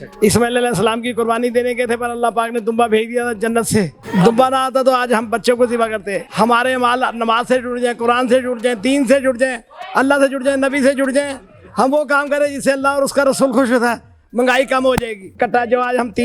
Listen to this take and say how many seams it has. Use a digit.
3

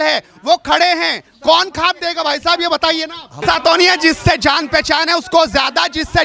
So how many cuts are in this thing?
1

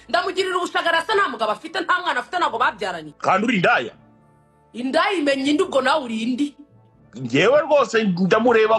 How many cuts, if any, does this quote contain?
1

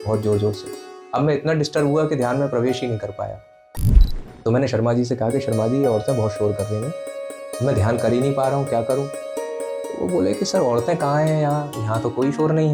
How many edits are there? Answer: 0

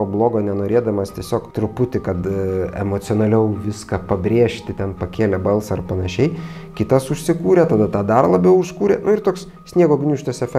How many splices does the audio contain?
1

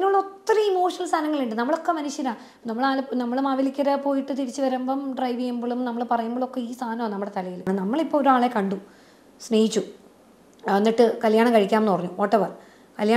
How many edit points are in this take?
1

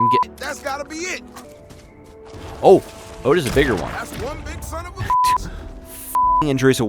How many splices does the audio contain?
1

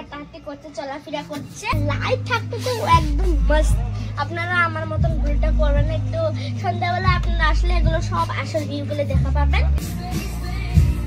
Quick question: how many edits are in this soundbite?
2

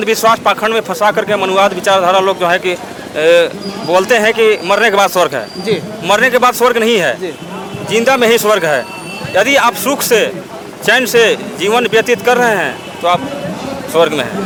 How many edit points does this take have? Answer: 0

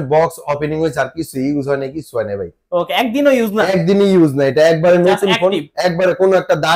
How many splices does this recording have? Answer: 0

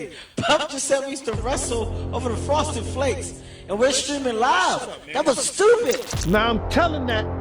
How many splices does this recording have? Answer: 1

